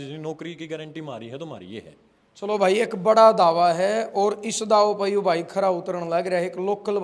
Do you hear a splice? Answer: no; 0 cuts

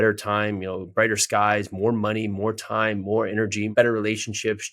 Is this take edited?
yes; 1 cut; at 3.7 s

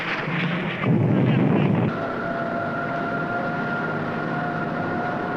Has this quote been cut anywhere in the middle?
no; 0 cuts

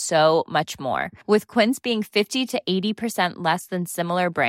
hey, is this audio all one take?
yes; 0 cuts

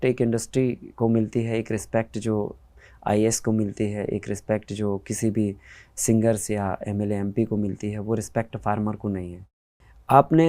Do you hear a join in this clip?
yes; 1 cut; at 9.4 s

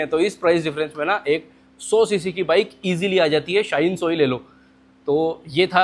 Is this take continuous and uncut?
yes; 0 cuts

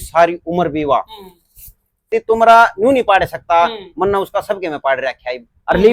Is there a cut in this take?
yes; 1 cut; at 2.1 s

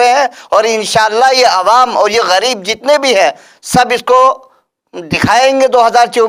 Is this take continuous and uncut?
yes; 0 cuts

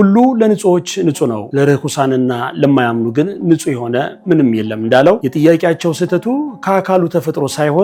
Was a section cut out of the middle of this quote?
no; 0 cuts

